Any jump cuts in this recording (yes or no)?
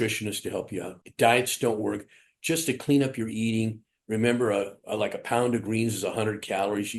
no